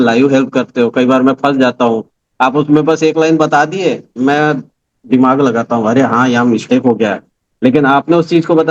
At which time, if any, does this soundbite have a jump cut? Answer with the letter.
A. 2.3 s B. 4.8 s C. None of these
C